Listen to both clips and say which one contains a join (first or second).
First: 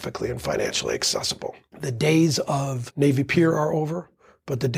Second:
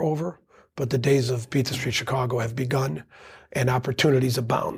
first